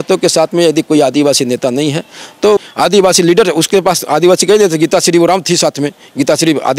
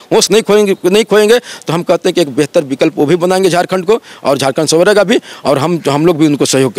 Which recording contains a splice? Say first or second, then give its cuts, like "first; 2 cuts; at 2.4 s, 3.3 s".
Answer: first; 1 cut; at 2.6 s